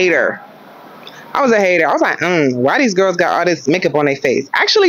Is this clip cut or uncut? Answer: uncut